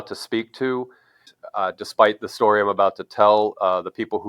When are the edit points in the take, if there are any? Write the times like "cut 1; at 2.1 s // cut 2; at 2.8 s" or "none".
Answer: cut 1; at 1.3 s